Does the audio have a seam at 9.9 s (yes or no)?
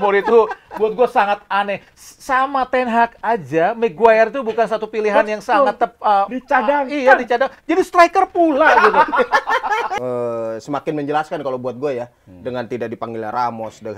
yes